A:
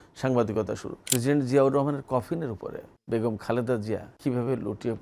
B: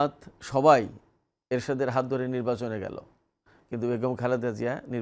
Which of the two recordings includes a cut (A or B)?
A